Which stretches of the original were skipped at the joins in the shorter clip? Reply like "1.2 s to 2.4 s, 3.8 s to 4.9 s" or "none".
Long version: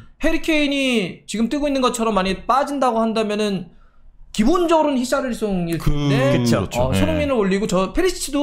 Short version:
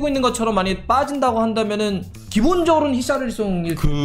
3.7 s to 4.1 s

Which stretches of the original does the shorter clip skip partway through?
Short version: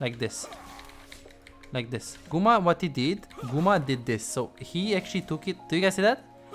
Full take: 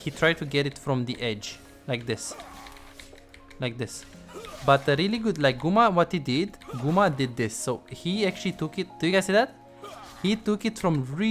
4.1 s to 5.6 s

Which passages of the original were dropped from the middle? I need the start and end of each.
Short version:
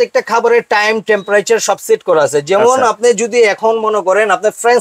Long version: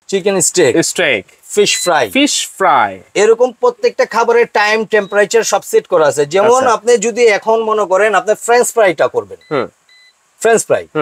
none

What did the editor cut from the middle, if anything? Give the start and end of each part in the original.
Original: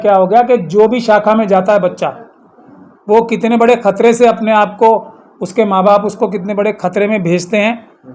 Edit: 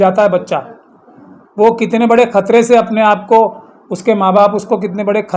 none

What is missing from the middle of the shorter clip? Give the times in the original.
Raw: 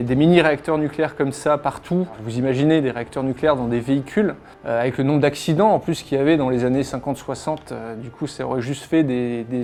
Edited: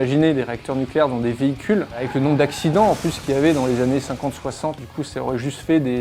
4.5 s to 4.9 s, 7.7 s to 8.1 s

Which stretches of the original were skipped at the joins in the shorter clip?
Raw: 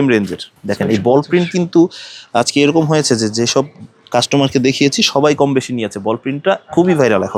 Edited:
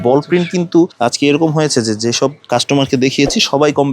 1.9 s to 2.3 s, 3.7 s to 4.0 s

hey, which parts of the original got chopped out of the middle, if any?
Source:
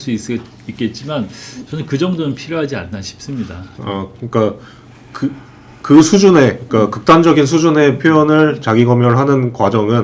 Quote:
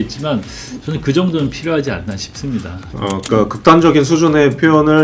4.1 s to 6.6 s

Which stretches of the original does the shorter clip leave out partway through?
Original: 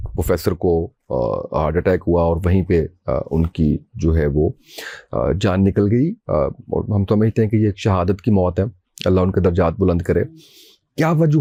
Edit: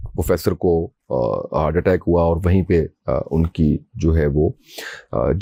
none

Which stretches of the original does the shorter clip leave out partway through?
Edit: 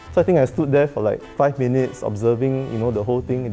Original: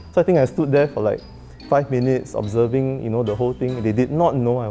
1.2 s to 1.6 s

